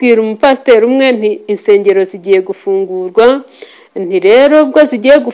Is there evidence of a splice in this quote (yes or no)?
no